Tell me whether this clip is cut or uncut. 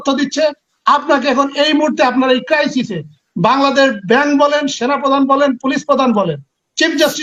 uncut